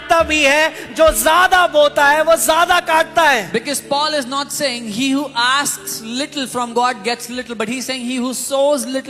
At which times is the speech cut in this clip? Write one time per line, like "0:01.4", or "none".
none